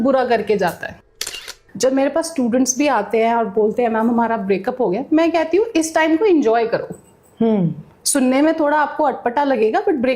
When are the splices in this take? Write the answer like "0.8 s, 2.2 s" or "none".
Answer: 1.3 s